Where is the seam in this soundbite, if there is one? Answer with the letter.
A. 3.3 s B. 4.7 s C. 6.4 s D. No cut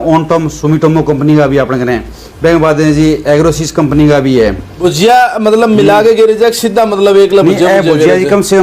B